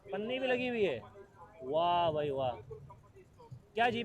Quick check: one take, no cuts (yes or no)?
yes